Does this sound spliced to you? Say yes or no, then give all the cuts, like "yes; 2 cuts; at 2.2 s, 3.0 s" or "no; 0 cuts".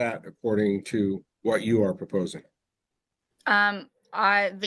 no; 0 cuts